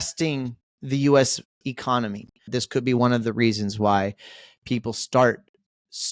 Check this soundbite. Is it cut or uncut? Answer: cut